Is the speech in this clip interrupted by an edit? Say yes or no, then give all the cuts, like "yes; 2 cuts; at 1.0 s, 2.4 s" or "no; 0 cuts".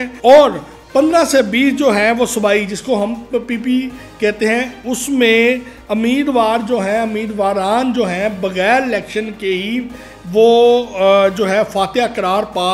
no; 0 cuts